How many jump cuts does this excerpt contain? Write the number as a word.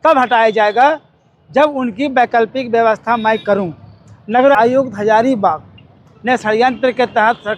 one